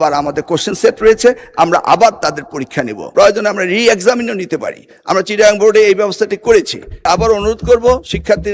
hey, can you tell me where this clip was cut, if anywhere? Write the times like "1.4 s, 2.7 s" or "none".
3.0 s, 7.1 s